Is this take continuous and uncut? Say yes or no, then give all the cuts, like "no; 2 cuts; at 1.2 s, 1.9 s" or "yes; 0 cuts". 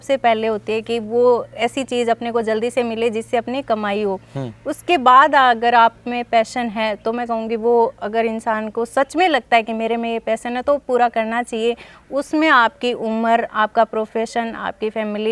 yes; 0 cuts